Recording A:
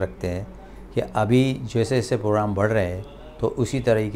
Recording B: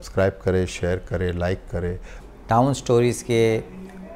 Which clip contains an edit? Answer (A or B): B